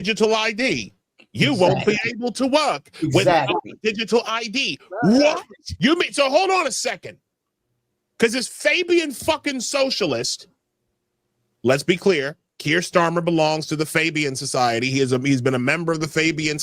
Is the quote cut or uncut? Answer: cut